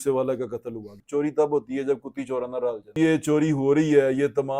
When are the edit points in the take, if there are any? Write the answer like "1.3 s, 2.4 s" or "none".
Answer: 1.0 s, 2.9 s